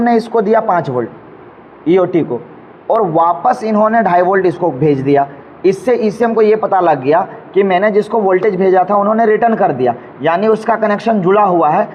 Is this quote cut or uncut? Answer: uncut